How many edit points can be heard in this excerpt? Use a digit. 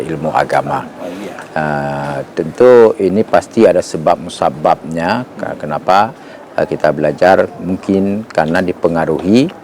0